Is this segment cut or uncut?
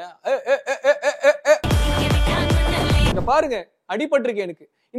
cut